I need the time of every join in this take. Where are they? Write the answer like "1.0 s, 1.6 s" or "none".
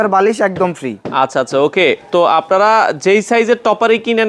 none